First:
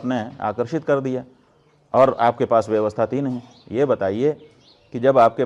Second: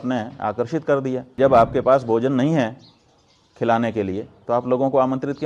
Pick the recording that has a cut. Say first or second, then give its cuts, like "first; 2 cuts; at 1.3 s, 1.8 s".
second; 1 cut; at 1.3 s